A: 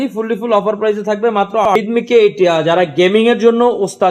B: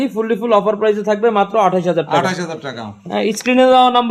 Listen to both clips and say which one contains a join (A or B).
A